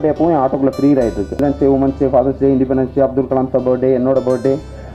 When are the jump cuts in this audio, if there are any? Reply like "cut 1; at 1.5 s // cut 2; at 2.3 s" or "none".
cut 1; at 1.4 s